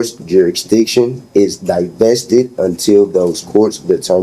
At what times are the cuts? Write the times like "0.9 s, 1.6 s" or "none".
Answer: none